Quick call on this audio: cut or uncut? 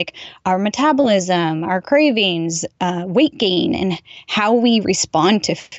uncut